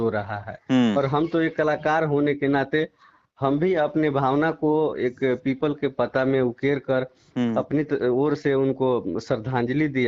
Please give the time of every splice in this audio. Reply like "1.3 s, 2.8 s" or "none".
none